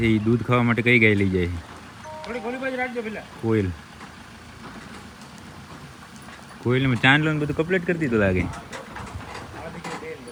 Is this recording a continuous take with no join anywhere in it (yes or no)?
yes